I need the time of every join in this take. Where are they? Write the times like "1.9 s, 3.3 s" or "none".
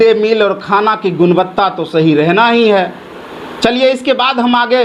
none